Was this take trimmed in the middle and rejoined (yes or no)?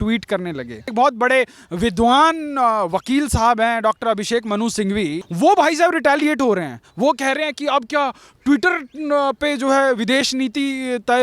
yes